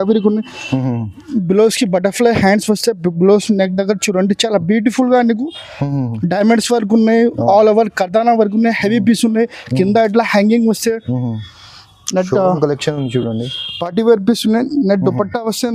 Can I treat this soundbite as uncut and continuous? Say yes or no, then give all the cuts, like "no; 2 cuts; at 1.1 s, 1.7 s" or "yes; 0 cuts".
yes; 0 cuts